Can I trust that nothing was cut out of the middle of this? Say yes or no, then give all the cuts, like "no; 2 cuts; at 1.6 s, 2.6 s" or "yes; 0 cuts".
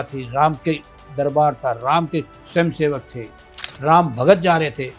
no; 1 cut; at 1.0 s